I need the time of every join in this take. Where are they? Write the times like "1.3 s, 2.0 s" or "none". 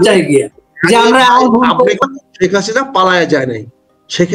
2.0 s